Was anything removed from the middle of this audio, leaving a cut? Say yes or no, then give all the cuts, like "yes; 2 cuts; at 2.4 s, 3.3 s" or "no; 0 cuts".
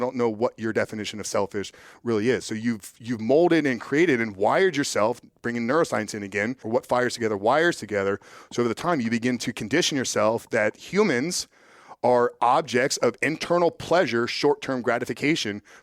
yes; 2 cuts; at 6.6 s, 13.2 s